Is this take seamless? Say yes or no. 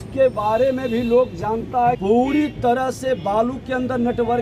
no